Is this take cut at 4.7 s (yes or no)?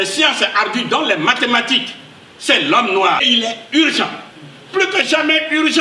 no